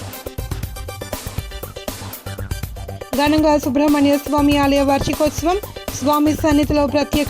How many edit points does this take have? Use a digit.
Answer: 0